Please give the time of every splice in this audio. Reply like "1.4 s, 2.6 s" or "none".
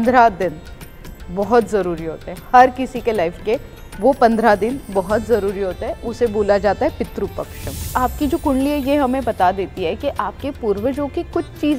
7.9 s